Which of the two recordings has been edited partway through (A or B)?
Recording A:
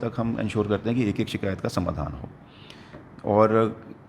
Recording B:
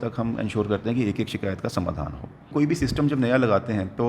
B